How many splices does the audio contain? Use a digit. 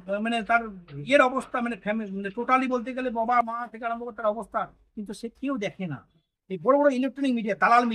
1